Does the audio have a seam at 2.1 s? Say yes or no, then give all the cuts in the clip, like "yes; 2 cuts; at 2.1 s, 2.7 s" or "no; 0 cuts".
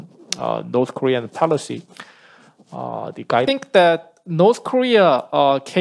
no; 1 cut; at 3.5 s